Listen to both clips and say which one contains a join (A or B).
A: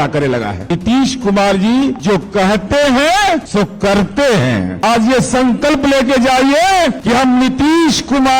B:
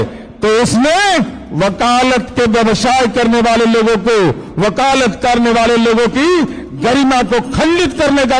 A